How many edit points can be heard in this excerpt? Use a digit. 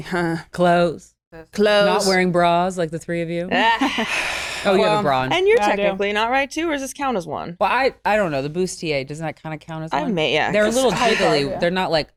0